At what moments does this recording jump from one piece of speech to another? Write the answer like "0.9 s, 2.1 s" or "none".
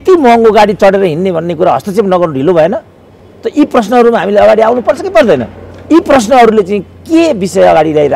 none